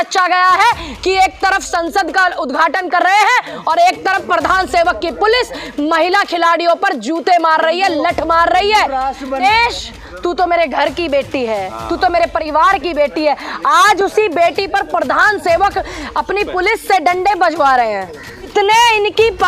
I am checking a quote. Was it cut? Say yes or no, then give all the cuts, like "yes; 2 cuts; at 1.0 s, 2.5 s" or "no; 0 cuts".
yes; 2 cuts; at 9.4 s, 18.5 s